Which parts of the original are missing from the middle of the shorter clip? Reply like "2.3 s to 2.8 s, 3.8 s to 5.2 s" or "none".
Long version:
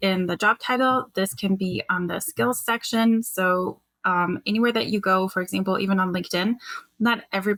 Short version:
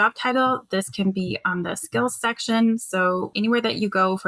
3.8 s to 4.4 s